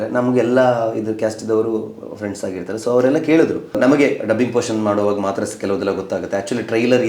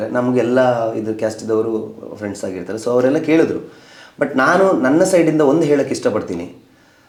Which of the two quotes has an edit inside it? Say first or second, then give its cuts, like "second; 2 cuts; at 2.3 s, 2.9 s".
first; 1 cut; at 3.8 s